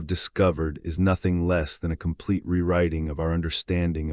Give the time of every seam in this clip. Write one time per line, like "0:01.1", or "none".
none